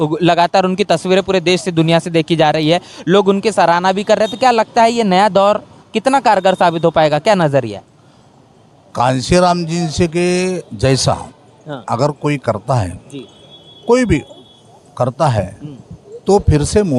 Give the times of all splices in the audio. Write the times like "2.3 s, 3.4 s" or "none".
none